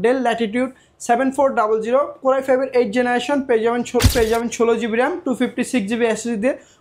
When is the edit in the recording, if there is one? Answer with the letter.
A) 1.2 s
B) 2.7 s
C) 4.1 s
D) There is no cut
C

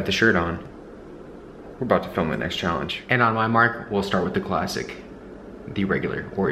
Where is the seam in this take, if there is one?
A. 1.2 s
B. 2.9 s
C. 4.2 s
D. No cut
B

